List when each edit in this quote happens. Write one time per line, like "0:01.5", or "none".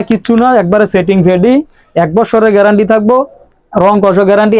none